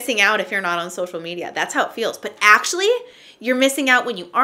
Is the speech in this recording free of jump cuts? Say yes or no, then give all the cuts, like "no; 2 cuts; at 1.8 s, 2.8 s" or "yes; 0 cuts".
yes; 0 cuts